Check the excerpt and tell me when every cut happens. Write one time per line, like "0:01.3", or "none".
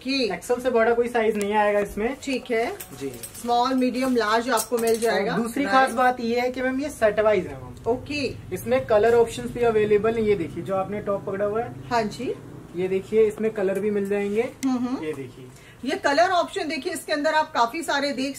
none